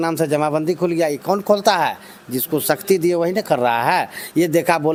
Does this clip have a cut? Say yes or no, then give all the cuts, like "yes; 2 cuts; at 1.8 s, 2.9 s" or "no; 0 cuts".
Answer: no; 0 cuts